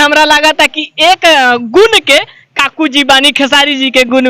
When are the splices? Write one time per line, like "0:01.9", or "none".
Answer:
none